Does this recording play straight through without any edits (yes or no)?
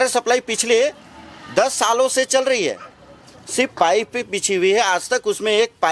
yes